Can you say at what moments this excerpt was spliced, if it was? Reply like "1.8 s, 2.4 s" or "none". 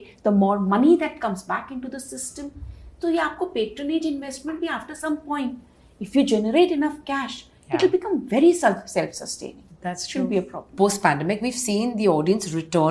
none